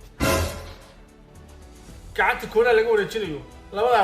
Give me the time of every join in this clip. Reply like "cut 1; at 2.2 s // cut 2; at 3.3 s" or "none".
cut 1; at 0.9 s